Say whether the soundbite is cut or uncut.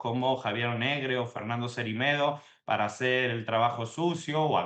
uncut